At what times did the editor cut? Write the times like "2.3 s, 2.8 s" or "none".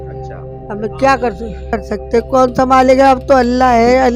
1.7 s